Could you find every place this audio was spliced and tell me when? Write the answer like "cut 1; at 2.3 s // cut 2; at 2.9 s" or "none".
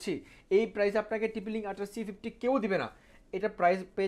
none